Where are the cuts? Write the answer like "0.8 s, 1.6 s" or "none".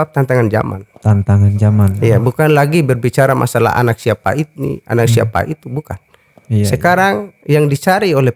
none